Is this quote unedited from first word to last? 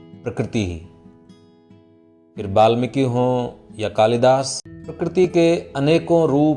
no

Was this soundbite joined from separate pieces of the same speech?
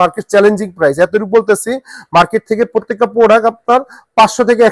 no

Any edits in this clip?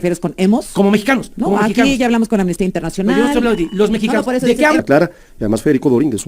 yes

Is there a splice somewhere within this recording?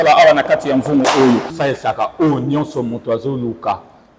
yes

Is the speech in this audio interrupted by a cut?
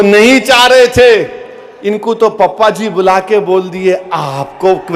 no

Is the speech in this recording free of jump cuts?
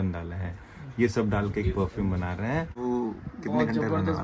no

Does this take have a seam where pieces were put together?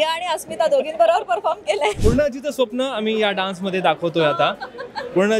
yes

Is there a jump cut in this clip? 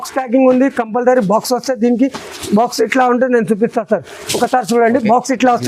no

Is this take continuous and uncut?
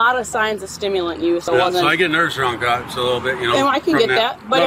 no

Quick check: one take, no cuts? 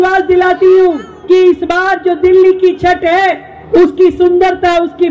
no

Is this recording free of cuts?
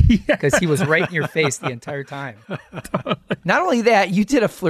no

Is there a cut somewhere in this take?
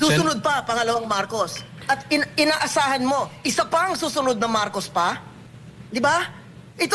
no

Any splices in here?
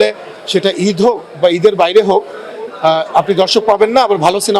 no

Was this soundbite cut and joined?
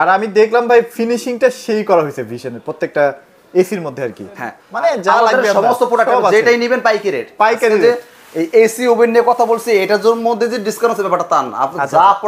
yes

